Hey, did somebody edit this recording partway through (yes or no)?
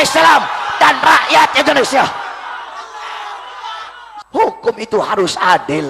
yes